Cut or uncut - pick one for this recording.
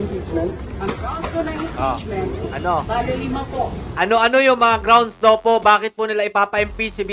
cut